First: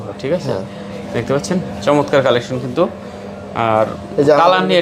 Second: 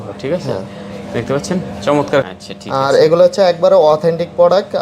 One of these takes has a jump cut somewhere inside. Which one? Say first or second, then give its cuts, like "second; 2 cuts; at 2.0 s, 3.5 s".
second; 1 cut; at 2.2 s